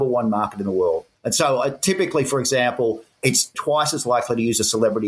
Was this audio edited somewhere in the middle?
yes; 2 cuts; at 1.2 s, 3.3 s

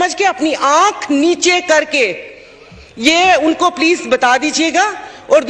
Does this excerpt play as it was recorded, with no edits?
yes; 0 cuts

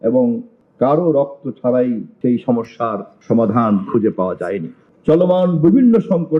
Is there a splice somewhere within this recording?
yes; 1 cut; at 4.8 s

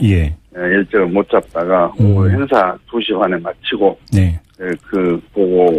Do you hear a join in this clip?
no; 0 cuts

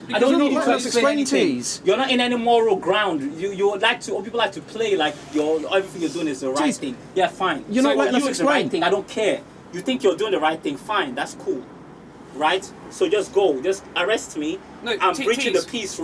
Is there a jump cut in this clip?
no; 0 cuts

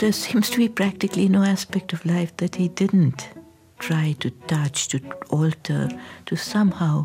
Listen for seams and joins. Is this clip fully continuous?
yes; 0 cuts

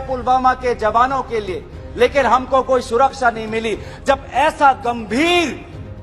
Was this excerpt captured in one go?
yes; 0 cuts

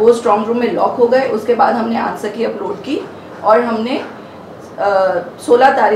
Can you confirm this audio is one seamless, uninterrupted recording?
yes; 0 cuts

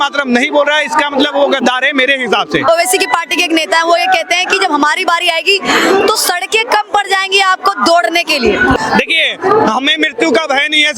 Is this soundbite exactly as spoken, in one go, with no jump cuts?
no; 2 cuts; at 2.7 s, 8.8 s

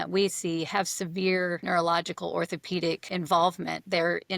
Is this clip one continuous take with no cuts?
no; 2 cuts; at 1.6 s, 3.1 s

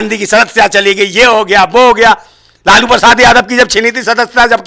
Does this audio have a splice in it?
no; 0 cuts

